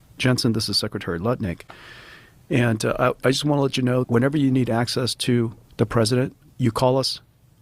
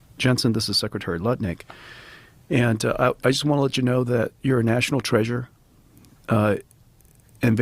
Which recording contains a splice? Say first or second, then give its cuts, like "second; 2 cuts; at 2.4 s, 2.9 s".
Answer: first; 3 cuts; at 4.1 s, 5.6 s, 6.5 s